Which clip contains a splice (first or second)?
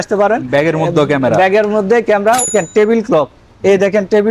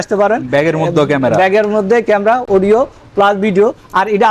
first